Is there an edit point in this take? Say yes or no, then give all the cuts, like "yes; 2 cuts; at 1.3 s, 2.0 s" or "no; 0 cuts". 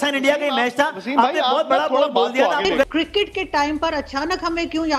yes; 1 cut; at 2.9 s